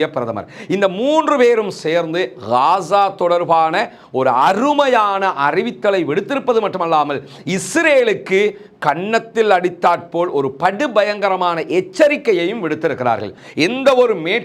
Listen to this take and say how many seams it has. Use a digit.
1